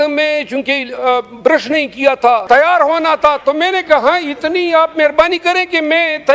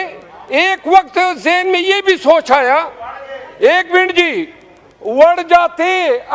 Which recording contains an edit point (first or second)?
first